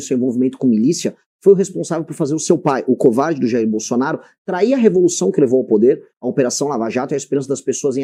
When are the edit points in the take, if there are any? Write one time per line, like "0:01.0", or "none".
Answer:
none